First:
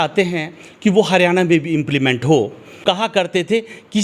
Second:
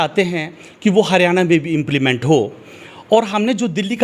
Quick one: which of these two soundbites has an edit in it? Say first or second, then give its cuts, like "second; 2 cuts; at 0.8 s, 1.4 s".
first; 1 cut; at 2.8 s